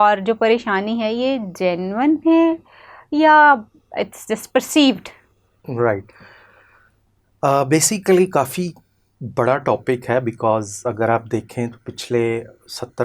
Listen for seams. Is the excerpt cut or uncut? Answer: uncut